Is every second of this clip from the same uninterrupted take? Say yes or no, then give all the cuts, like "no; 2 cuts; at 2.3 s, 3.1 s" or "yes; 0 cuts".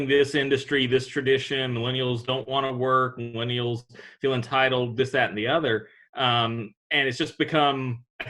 yes; 0 cuts